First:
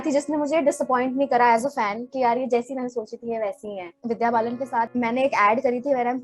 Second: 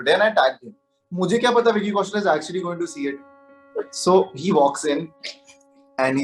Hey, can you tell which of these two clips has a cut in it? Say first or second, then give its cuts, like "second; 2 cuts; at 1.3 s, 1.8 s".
first; 2 cuts; at 3.9 s, 4.9 s